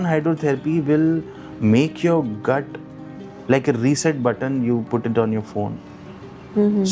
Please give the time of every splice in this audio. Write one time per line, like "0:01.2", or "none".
none